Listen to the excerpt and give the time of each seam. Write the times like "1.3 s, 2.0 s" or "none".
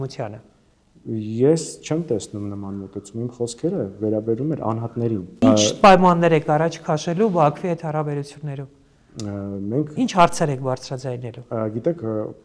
5.4 s